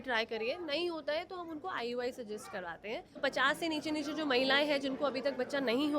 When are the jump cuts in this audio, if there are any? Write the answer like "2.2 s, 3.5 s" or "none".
3.1 s